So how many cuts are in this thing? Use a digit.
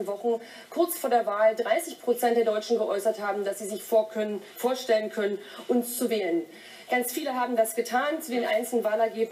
1